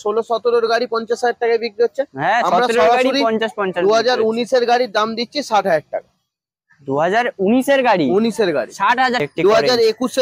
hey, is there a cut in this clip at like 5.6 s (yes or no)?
no